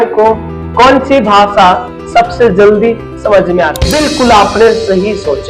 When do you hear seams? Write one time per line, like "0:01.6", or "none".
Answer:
0:03.8